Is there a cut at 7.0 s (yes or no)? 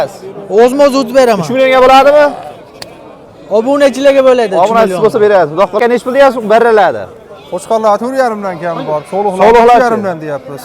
no